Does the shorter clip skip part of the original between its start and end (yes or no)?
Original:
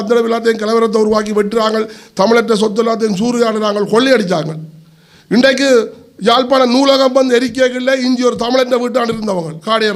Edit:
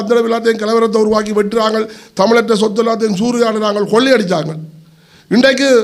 no